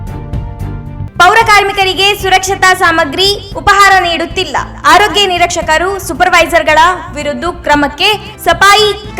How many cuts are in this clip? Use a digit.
1